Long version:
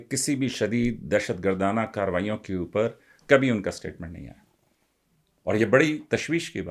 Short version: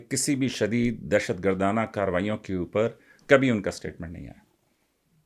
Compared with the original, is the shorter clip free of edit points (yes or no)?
yes